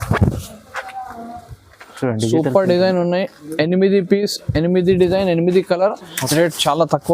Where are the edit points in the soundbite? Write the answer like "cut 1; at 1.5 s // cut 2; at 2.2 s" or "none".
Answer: cut 1; at 6.2 s